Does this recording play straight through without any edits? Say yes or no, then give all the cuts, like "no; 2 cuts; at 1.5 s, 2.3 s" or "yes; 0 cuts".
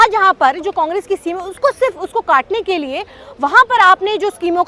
yes; 0 cuts